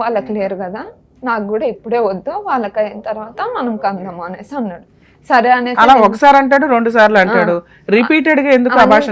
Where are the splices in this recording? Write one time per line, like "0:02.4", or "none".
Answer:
none